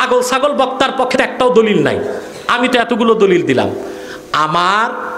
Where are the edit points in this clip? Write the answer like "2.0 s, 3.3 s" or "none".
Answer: 1.1 s